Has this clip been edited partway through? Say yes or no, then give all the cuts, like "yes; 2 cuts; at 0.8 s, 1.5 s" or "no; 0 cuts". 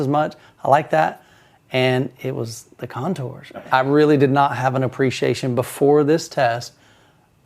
yes; 1 cut; at 3.6 s